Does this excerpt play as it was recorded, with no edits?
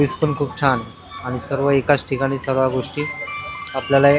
yes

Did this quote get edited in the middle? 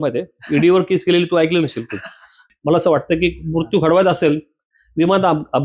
yes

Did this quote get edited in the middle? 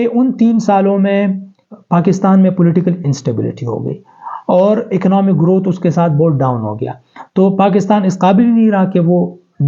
no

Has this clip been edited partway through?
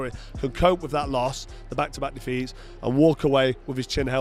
no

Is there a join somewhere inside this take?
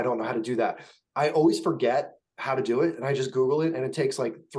no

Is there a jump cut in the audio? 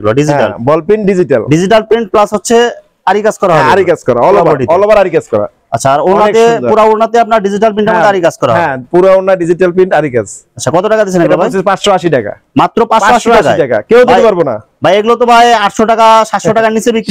no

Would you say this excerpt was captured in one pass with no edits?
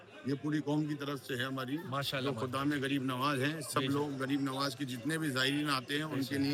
yes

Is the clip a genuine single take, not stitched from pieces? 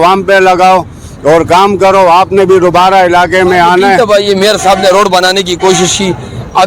no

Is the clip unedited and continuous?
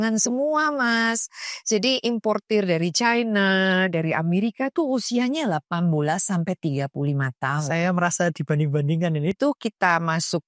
no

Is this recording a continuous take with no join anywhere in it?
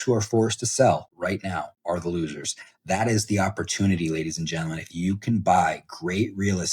no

